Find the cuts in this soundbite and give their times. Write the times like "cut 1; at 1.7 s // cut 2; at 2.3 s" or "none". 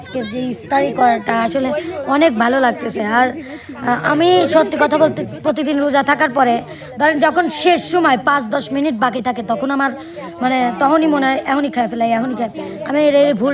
none